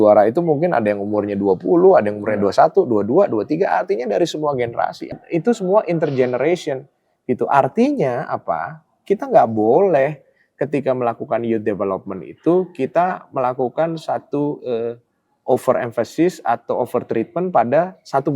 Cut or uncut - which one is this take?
cut